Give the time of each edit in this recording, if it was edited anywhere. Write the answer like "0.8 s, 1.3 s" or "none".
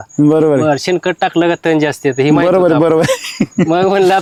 none

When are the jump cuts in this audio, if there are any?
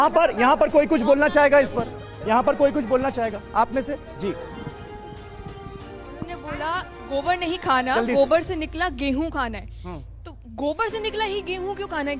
none

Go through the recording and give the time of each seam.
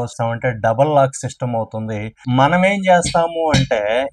2.1 s

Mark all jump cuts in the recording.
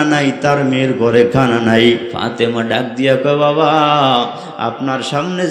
2.2 s

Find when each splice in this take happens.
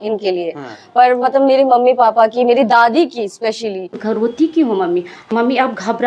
3.9 s, 5.3 s

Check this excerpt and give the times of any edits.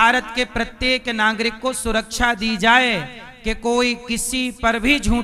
none

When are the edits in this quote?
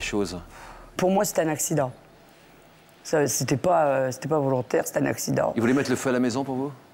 1.0 s

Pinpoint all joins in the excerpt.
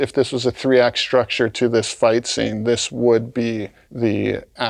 1.5 s, 3.8 s

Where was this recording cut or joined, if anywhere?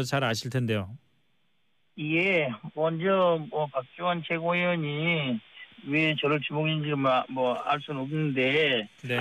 2.5 s

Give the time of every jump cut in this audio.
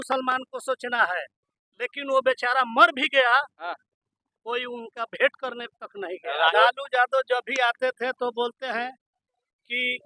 6.5 s

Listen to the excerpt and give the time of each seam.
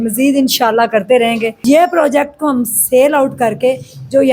1.5 s

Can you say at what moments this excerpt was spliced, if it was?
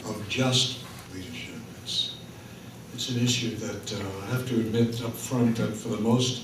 3.5 s

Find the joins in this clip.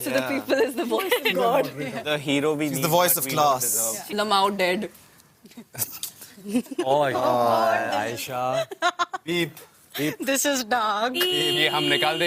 3.9 s

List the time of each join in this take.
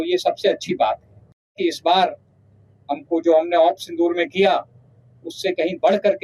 1.6 s

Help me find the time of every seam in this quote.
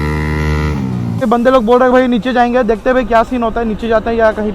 1.2 s

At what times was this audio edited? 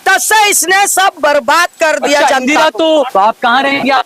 3.1 s

